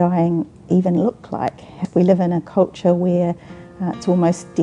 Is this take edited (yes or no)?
yes